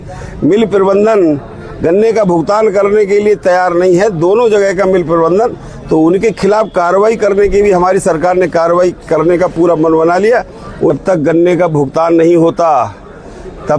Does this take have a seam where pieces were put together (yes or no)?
yes